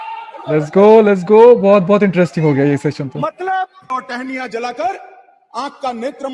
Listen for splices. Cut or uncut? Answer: cut